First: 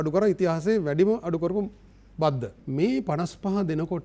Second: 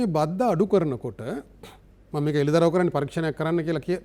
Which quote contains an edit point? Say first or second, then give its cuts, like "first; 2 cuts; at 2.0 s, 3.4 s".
first; 1 cut; at 2.5 s